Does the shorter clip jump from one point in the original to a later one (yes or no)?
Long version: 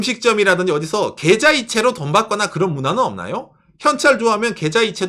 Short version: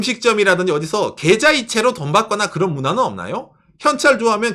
no